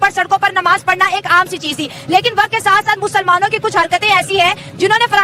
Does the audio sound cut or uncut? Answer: uncut